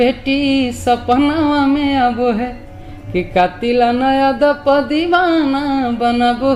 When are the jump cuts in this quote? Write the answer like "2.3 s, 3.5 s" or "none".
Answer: none